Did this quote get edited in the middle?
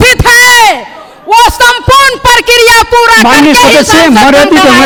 no; 0 cuts

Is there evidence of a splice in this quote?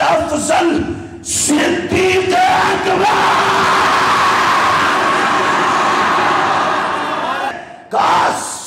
yes; 1 cut; at 7.5 s

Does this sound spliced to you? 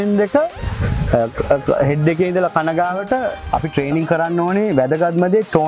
yes; 1 cut; at 3.4 s

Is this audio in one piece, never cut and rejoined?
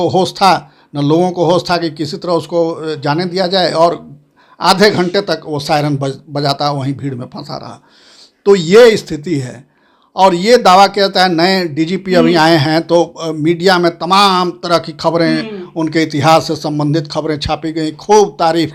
yes; 0 cuts

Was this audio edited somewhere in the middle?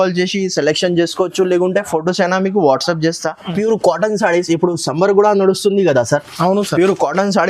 yes; 1 cut; at 3.5 s

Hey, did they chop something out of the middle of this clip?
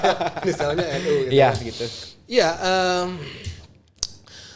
no; 0 cuts

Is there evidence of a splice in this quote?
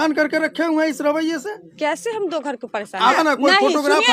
yes; 1 cut; at 3.1 s

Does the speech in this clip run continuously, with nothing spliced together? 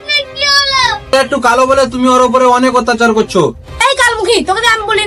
no; 2 cuts; at 1.1 s, 3.8 s

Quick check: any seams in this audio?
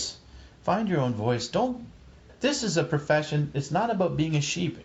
yes; 1 cut; at 2.3 s

